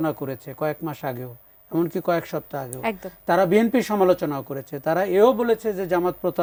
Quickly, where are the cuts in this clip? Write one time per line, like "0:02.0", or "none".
none